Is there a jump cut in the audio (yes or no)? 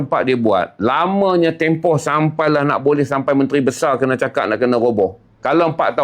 no